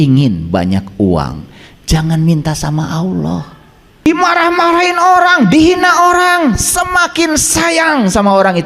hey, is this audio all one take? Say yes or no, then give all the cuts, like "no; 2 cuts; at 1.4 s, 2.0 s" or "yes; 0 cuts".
no; 1 cut; at 4.1 s